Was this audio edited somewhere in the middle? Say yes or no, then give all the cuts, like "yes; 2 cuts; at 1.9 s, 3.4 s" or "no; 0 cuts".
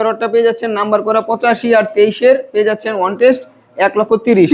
no; 0 cuts